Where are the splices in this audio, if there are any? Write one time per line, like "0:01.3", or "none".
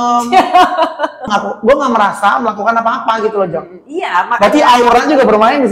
0:01.3